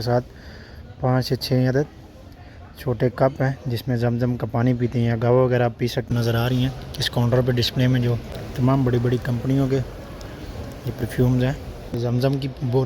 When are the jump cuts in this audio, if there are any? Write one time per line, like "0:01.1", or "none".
0:06.1
0:08.4
0:11.9